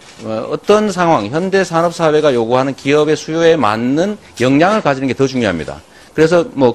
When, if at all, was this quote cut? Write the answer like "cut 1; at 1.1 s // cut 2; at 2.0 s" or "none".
cut 1; at 1.3 s